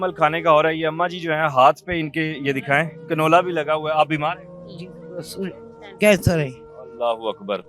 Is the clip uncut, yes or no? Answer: yes